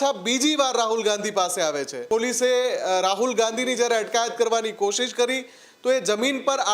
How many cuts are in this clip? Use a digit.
1